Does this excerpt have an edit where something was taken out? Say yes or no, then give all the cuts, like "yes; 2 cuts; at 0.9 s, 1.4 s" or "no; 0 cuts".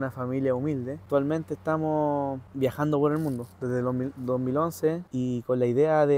yes; 3 cuts; at 1.0 s, 2.4 s, 5.0 s